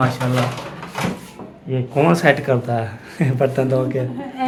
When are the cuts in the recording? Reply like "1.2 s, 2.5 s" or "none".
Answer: none